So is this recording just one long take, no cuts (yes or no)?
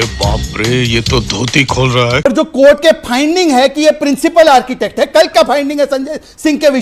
no